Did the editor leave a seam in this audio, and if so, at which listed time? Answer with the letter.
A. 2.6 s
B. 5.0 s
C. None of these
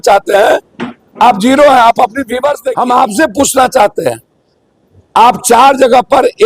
A